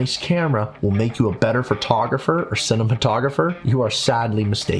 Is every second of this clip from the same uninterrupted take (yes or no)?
yes